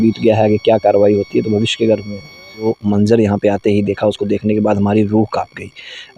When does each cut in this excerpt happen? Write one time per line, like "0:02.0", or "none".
0:02.7